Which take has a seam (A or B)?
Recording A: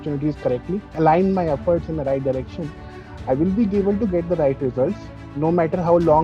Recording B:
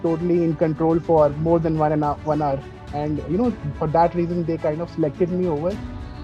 A